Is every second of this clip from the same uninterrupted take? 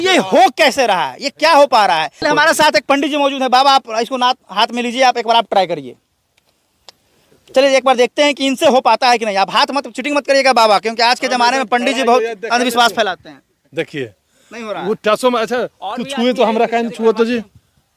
no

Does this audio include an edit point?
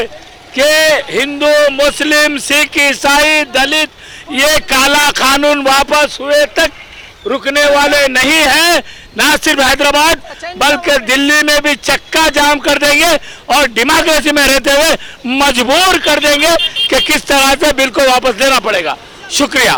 no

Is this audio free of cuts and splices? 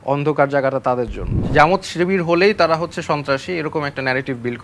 no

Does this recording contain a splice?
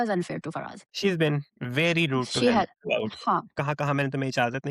yes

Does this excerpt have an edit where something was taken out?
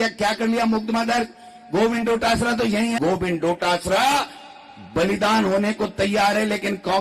yes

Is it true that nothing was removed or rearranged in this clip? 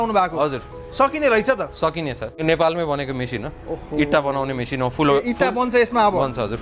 no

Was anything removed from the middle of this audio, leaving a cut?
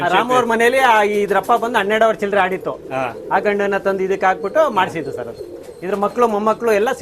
no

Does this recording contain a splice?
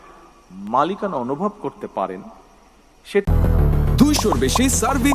yes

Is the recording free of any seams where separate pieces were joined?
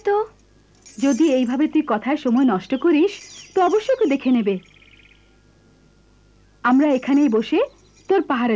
yes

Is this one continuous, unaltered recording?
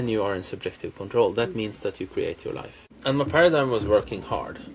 no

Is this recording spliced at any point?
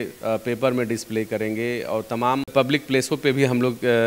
yes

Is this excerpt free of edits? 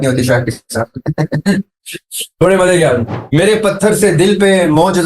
no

